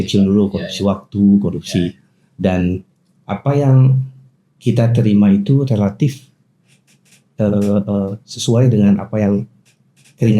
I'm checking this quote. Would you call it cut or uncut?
uncut